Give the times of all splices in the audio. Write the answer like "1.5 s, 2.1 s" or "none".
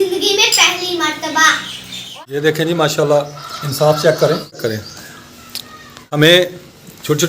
2.1 s, 4.6 s, 6.2 s

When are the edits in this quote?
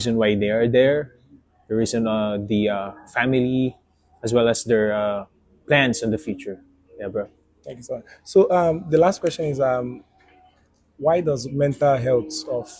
none

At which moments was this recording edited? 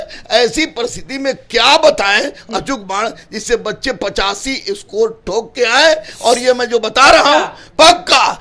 none

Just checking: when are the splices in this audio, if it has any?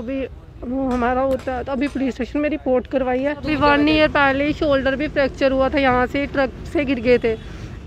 3.4 s

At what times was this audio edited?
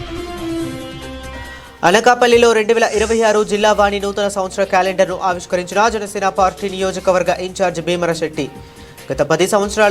none

